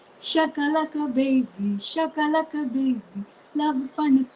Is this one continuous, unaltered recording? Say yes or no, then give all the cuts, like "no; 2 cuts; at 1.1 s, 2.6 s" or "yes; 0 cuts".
yes; 0 cuts